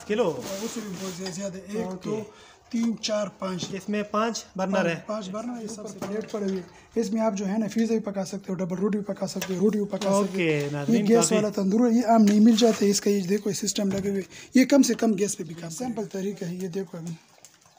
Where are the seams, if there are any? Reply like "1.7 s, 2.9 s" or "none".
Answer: 5.8 s, 15.6 s